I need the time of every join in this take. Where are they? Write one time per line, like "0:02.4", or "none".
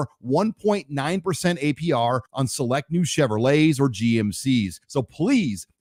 none